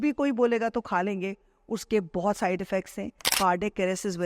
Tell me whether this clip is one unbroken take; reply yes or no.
no